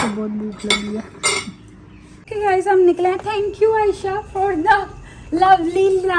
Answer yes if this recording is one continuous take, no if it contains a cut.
no